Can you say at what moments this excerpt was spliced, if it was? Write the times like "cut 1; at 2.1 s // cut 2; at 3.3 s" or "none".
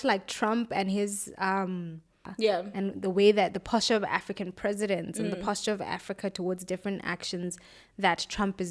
cut 1; at 2.2 s